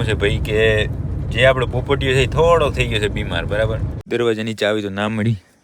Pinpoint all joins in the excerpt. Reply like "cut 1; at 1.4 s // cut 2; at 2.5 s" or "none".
cut 1; at 3.9 s